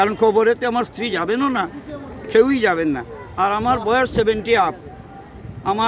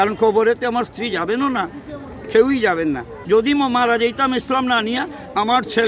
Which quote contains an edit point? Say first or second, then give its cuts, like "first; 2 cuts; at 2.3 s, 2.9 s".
second; 1 cut; at 3.1 s